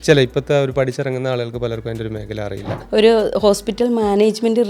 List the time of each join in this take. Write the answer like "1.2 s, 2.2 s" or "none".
2.7 s